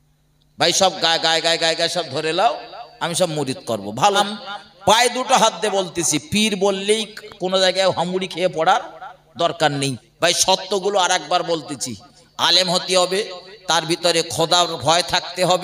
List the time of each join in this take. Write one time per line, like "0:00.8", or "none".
0:04.2
0:10.0